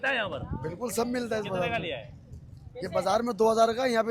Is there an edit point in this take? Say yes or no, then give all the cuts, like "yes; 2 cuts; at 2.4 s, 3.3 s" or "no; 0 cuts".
no; 0 cuts